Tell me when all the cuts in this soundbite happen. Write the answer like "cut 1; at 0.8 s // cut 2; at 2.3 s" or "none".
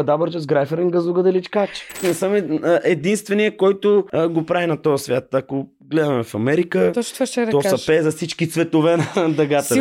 cut 1; at 2.0 s // cut 2; at 4.1 s